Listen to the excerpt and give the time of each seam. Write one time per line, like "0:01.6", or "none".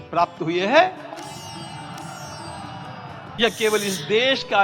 0:03.4